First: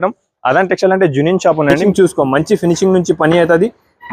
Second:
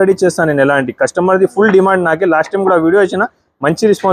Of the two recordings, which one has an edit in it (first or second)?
first